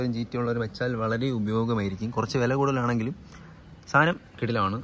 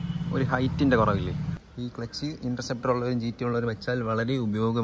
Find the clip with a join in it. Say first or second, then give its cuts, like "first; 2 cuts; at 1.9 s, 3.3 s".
second; 1 cut; at 1.5 s